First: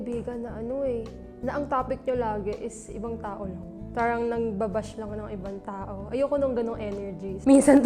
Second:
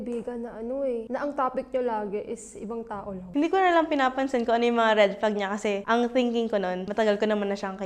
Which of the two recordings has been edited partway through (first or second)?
second